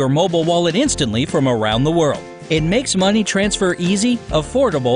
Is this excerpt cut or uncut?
uncut